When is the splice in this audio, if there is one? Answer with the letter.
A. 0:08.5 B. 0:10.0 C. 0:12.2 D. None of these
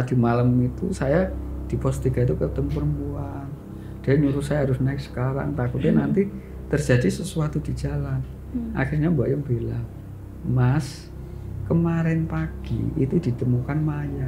D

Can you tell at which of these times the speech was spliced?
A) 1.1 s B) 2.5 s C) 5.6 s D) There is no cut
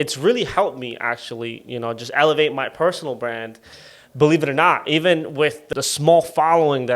C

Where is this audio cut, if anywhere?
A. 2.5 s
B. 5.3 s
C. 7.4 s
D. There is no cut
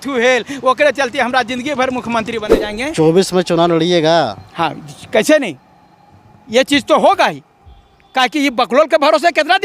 A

